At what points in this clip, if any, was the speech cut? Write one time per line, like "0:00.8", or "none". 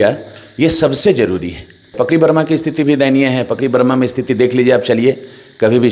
0:01.9